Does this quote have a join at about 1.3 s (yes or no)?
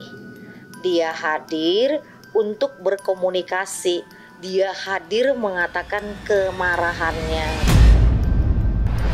no